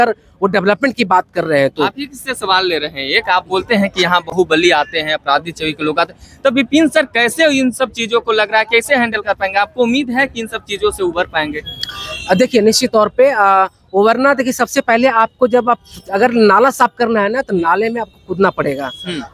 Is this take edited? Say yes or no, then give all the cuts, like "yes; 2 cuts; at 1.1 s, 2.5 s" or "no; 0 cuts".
no; 0 cuts